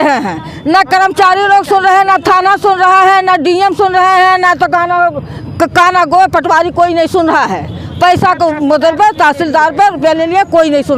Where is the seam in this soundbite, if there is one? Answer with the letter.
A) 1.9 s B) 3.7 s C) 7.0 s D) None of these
D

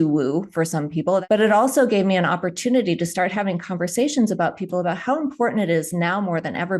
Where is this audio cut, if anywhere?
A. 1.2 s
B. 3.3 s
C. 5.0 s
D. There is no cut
A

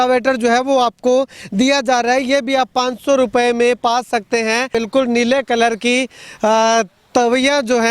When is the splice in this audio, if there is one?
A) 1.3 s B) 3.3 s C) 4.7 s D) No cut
C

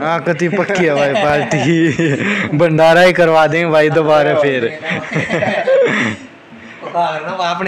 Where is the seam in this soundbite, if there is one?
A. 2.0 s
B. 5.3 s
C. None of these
C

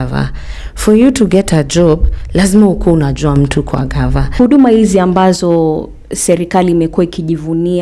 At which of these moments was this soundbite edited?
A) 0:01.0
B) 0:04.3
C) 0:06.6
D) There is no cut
B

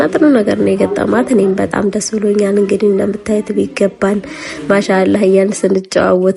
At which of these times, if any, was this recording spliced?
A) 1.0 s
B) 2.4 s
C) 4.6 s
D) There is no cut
D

